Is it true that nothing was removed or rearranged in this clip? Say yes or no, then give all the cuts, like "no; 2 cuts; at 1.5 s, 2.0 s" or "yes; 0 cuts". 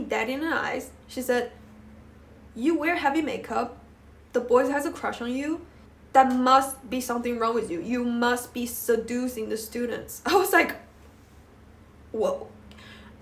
yes; 0 cuts